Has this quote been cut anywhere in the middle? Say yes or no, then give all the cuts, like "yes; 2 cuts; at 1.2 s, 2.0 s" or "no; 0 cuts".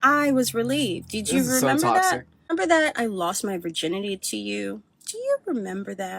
yes; 1 cut; at 2.4 s